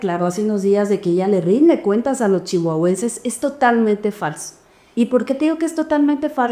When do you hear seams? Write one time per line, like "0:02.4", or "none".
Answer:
none